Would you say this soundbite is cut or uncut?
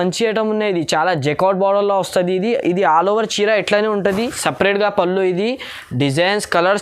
cut